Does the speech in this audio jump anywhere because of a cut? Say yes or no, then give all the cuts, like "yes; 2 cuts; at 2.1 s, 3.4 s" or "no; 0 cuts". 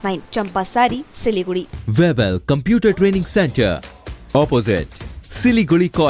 yes; 1 cut; at 1.8 s